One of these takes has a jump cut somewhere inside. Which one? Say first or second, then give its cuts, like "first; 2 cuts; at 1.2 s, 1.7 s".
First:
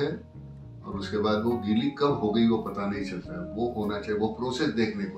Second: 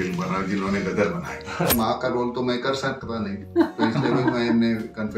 second; 1 cut; at 1.7 s